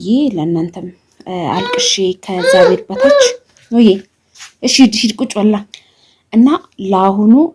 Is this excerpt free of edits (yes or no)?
yes